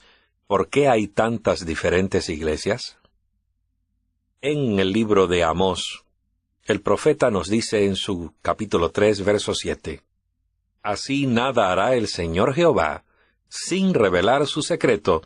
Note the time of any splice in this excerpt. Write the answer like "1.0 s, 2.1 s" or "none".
5.6 s

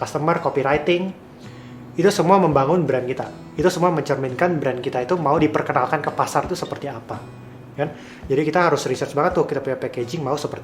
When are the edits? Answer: 5.4 s

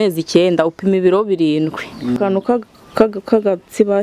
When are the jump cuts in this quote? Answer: 2.2 s

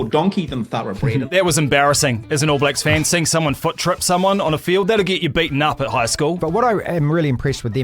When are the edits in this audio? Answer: 1.3 s, 6.4 s

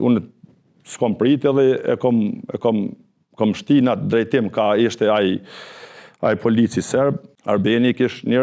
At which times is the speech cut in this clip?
7.3 s

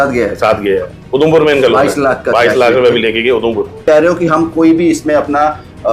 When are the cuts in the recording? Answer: 3.8 s

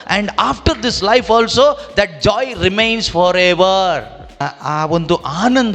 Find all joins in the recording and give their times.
4.5 s

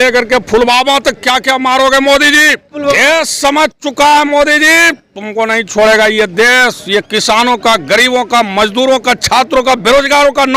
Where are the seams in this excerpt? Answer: 2.7 s

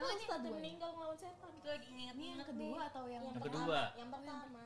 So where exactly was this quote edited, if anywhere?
none

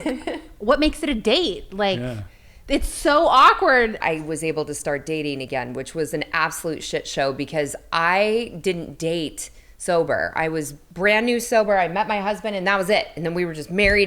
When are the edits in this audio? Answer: 4.0 s, 10.8 s

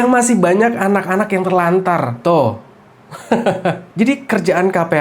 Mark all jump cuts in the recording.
3.8 s

